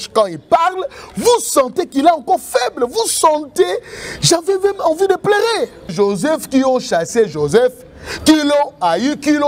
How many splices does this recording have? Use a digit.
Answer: 1